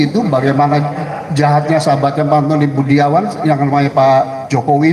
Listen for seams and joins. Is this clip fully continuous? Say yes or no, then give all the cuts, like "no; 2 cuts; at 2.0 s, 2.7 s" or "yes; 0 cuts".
yes; 0 cuts